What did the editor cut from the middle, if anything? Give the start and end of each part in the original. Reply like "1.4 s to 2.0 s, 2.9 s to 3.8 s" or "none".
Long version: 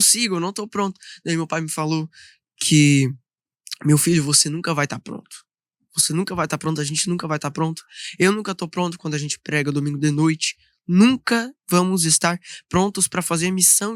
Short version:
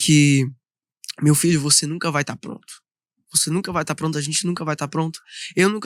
none